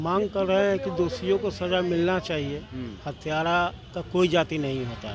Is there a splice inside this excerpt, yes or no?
no